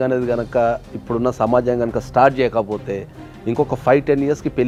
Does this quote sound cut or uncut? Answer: uncut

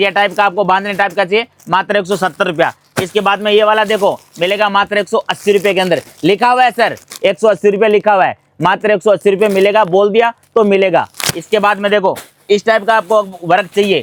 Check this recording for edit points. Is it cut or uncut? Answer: uncut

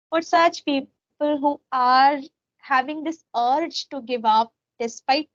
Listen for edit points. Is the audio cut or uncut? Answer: uncut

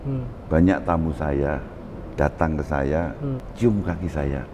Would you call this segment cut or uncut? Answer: cut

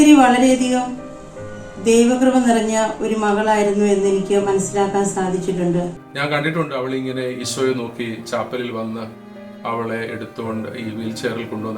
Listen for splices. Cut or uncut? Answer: cut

